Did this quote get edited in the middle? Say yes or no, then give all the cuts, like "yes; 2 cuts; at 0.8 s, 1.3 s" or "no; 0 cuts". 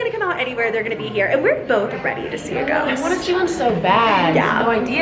no; 0 cuts